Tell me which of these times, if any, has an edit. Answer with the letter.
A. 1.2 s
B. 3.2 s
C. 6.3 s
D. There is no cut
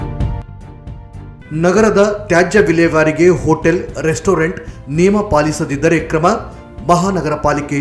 A